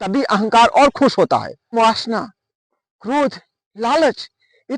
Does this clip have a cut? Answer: yes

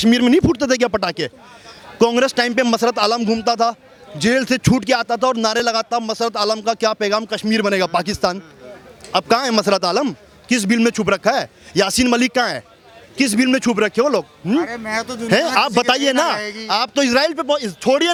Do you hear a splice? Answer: no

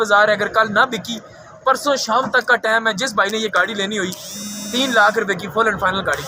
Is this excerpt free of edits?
yes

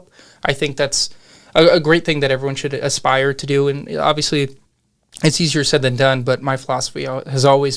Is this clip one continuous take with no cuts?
yes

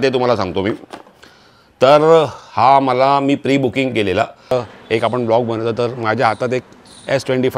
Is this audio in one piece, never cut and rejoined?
no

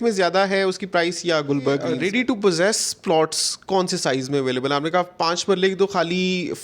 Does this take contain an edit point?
yes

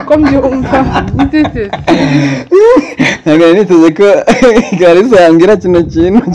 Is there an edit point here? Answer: no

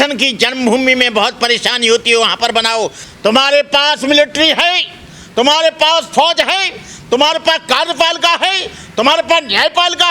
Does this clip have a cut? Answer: yes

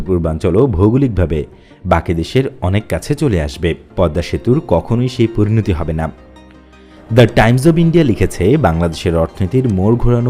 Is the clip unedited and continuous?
no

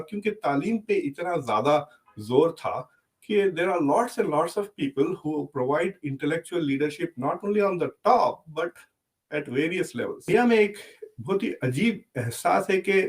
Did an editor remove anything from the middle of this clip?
yes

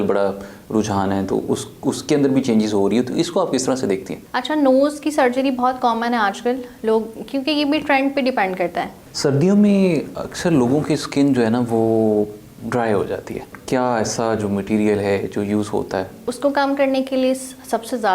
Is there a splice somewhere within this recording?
yes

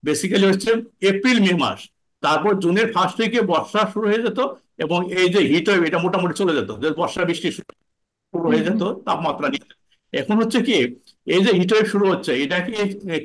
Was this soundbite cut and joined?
no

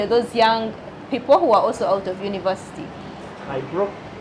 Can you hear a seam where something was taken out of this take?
yes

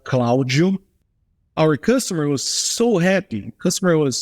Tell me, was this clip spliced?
yes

